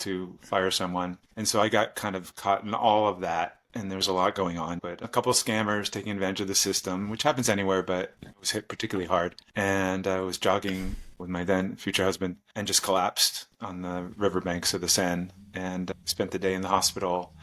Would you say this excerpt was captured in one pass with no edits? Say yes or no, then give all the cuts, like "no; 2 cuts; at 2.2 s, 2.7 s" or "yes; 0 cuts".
no; 1 cut; at 4.8 s